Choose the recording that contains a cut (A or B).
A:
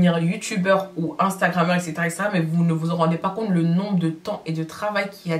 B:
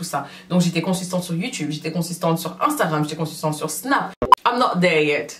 B